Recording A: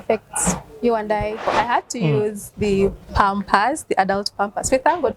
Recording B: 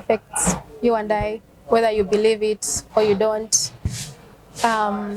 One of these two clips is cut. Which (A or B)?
A